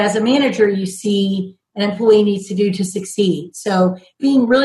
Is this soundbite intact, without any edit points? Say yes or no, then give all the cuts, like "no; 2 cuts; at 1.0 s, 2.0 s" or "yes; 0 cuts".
yes; 0 cuts